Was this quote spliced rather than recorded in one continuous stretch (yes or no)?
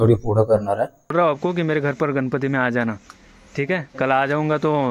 yes